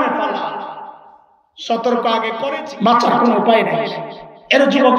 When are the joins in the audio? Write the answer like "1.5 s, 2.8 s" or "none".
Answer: 2.6 s